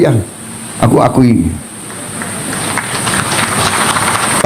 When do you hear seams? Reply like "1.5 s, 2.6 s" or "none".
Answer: none

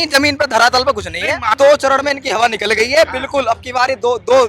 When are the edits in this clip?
1.5 s

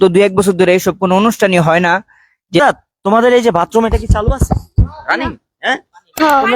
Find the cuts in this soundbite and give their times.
2.6 s

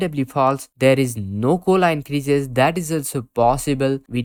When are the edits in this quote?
none

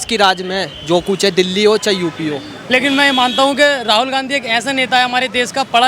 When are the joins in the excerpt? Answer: 2.5 s

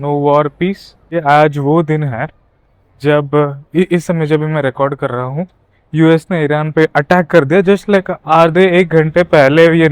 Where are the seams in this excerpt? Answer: none

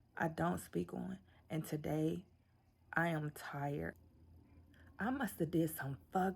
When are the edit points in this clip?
3.9 s

